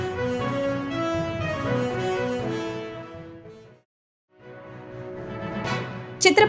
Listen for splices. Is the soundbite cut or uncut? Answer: uncut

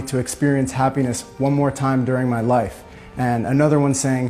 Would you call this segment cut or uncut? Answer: uncut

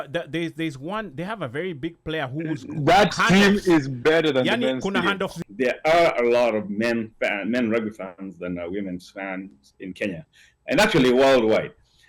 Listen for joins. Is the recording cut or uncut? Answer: cut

